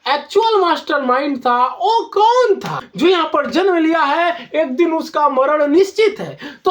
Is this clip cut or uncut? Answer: cut